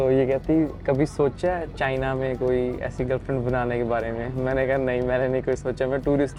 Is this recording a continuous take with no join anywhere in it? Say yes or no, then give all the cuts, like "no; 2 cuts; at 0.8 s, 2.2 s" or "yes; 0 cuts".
yes; 0 cuts